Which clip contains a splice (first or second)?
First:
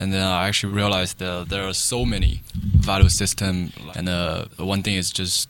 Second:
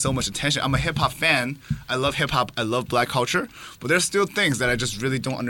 first